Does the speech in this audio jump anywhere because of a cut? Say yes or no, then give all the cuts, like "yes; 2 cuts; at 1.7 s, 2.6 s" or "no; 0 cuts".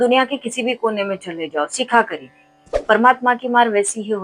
yes; 1 cut; at 2.8 s